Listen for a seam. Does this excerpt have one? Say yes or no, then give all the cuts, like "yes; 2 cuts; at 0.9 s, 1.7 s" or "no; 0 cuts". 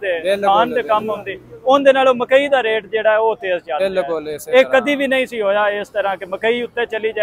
yes; 1 cut; at 3.7 s